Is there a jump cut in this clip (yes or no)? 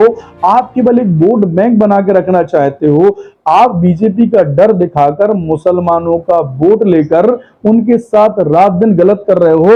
no